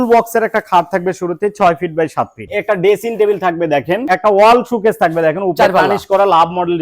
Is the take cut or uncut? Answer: cut